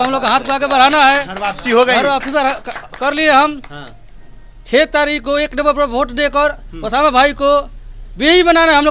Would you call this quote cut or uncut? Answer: uncut